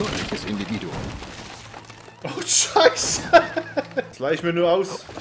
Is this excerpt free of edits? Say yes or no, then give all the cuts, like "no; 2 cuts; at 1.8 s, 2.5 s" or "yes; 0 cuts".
no; 1 cut; at 4.0 s